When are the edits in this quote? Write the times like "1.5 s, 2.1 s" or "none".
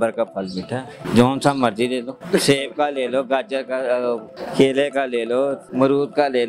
0.9 s, 2.1 s, 4.4 s, 5.6 s